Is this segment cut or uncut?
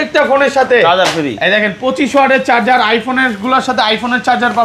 uncut